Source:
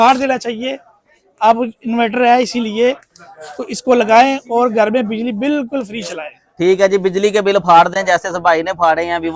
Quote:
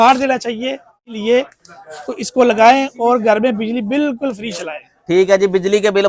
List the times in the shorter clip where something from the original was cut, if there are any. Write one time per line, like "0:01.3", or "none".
0:01.2